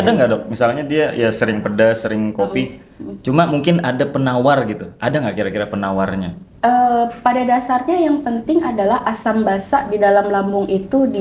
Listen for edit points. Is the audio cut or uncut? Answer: uncut